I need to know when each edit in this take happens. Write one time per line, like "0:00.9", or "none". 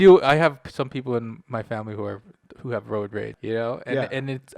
0:03.3